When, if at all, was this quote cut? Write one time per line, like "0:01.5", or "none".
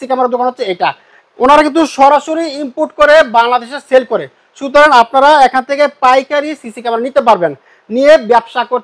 none